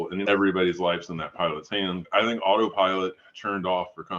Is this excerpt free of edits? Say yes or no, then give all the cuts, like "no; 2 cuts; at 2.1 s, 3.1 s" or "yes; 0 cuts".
no; 1 cut; at 2.0 s